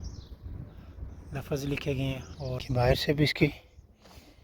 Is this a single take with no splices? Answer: no; 1 cut; at 2.6 s

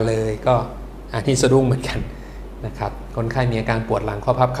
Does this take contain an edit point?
no; 0 cuts

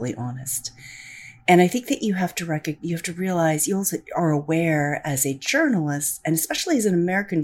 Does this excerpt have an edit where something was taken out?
no; 0 cuts

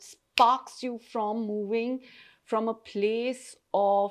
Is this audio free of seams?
yes; 0 cuts

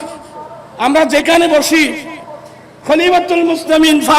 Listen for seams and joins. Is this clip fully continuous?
yes; 0 cuts

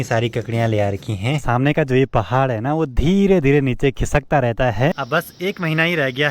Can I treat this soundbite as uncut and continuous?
no; 2 cuts; at 1.4 s, 4.9 s

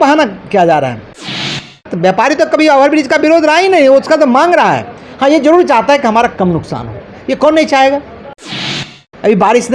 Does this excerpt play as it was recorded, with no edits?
no; 2 cuts; at 1.5 s, 8.6 s

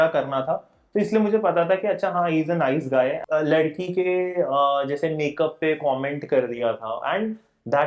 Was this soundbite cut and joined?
yes; 1 cut; at 3.2 s

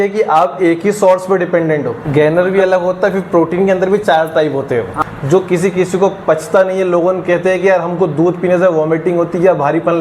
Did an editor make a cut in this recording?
yes; 2 cuts; at 2.0 s, 5.0 s

